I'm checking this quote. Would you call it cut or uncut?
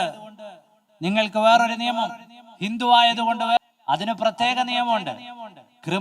cut